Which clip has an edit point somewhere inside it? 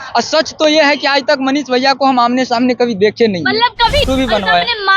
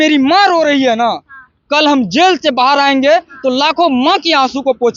first; 1 cut; at 4.1 s

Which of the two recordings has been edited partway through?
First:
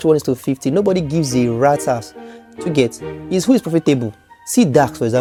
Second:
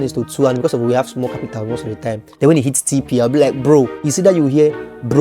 second; 2 cuts; at 2.3 s, 4.0 s

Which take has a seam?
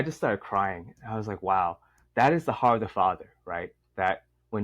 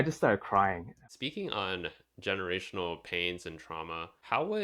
second; 1 cut; at 1.0 s

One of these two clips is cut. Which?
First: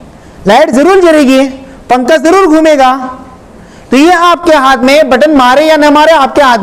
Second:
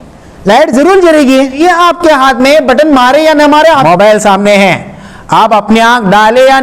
second; 2 cuts; at 1.6 s, 3.8 s

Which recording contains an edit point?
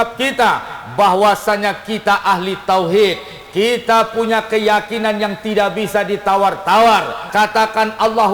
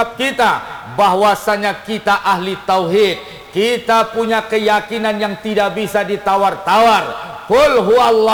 first; 1 cut; at 7.2 s

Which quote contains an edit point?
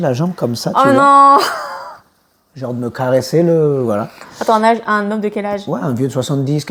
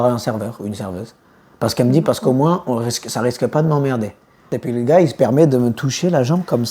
second; 1 cut; at 4.6 s

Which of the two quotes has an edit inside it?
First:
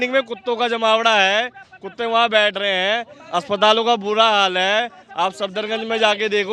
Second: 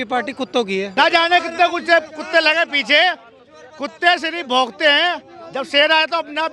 second; 1 cut; at 0.9 s

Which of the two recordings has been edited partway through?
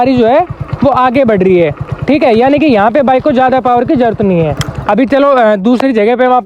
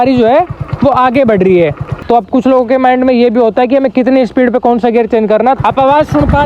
second; 2 cuts; at 1.9 s, 5.6 s

